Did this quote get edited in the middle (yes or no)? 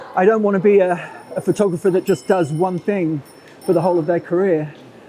no